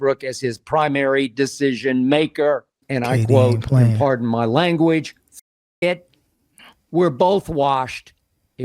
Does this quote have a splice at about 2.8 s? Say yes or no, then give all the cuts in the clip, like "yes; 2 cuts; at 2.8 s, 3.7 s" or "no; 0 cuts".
yes; 1 cut; at 2.8 s